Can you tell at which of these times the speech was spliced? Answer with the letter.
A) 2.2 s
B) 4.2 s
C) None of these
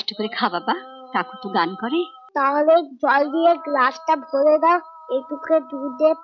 A